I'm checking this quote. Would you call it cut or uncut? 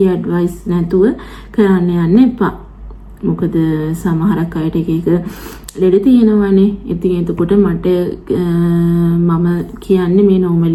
uncut